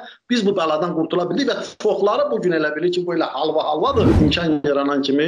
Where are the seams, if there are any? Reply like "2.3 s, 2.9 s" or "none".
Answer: 4.1 s